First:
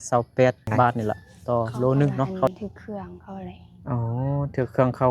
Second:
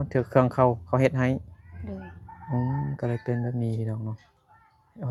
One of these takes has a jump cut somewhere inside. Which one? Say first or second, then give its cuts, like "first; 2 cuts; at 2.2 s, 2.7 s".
first; 1 cut; at 2.5 s